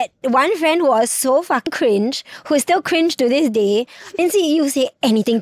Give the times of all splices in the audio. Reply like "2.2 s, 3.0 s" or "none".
1.7 s, 4.2 s